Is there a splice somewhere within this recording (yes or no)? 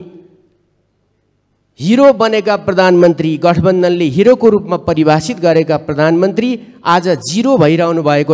no